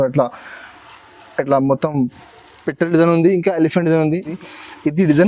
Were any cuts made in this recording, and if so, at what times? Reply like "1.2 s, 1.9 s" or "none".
4.4 s